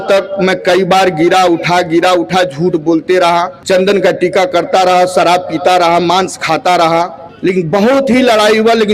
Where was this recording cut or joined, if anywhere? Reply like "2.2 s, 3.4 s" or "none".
3.6 s, 7.2 s